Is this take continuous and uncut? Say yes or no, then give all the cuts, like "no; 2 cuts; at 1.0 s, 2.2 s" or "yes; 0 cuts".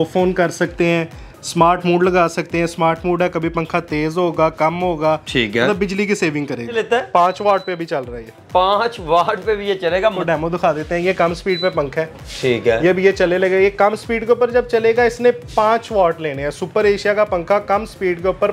no; 2 cuts; at 6.7 s, 10.2 s